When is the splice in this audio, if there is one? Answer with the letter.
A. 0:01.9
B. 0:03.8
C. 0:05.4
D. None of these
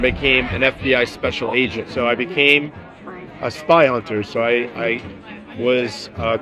A